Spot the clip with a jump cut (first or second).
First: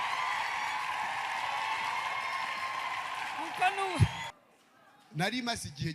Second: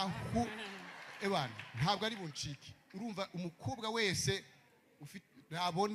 first